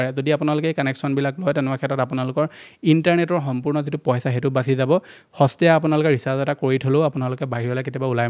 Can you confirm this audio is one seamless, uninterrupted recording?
yes; 0 cuts

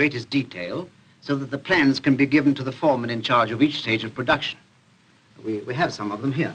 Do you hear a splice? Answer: yes; 1 cut; at 2.1 s

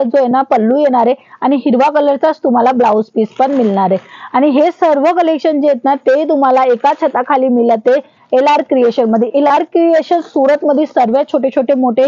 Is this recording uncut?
yes; 0 cuts

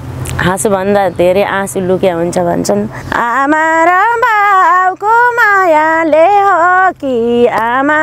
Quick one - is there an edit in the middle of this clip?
yes; 1 cut; at 3.0 s

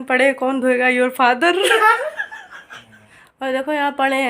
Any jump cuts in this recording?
yes; 1 cut; at 3.1 s

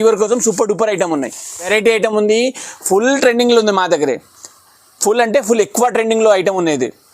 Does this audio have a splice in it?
yes; 1 cut; at 1.7 s

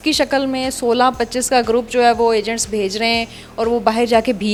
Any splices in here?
no; 0 cuts

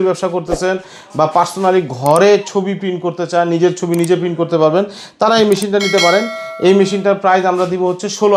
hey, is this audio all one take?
yes; 0 cuts

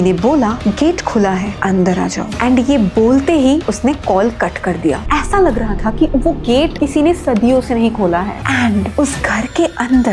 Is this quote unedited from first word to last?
no; 2 cuts; at 5.0 s, 8.3 s

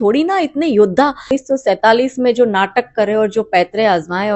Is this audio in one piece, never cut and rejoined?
no; 1 cut; at 1.3 s

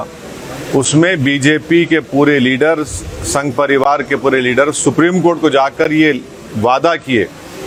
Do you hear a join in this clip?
no; 0 cuts

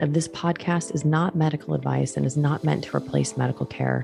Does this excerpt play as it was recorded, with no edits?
yes; 0 cuts

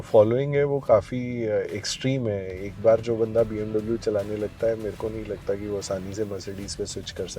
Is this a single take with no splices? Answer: yes; 0 cuts

